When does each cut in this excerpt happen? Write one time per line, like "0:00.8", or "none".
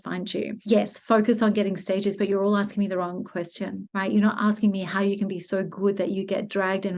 0:00.8
0:03.8

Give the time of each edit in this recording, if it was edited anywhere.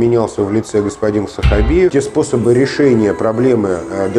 0:01.9

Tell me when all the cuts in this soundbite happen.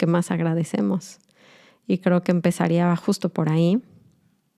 none

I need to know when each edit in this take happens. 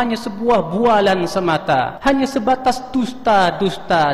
0:01.9

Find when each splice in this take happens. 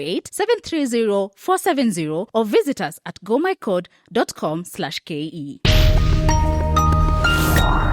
0:05.6

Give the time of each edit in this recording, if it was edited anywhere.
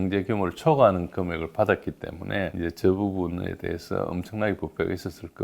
none

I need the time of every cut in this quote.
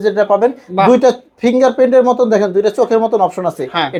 none

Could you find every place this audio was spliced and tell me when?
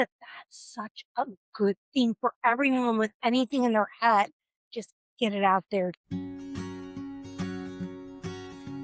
0:06.0

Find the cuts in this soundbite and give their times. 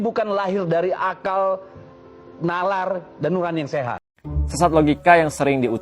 0:04.0

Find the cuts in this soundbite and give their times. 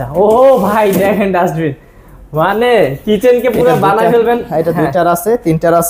none

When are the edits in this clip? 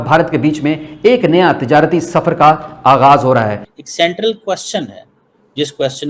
0:03.6

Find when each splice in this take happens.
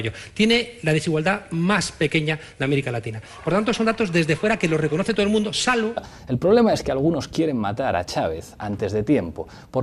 none

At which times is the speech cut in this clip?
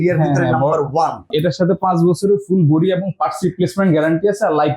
0:01.3

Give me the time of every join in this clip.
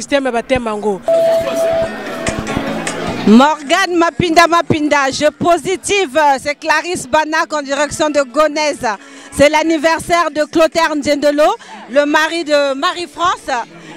0:01.1

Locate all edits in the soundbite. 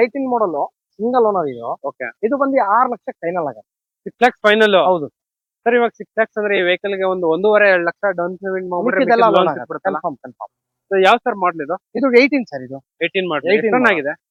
none

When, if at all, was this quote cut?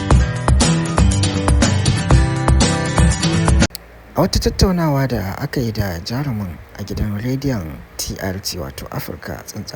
0:03.6

